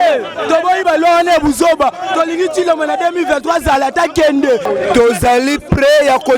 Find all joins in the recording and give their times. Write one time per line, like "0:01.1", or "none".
0:04.7